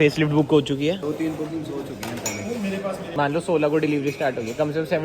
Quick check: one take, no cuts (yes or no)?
no